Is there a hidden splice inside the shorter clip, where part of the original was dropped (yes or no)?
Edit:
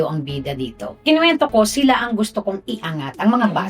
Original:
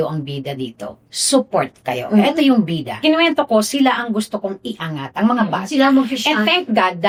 yes